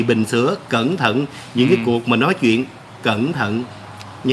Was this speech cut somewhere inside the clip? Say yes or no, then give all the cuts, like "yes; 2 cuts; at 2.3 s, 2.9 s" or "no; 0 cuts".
no; 0 cuts